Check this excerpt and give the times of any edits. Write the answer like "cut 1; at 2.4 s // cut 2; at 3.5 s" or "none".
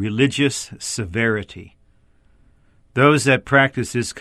none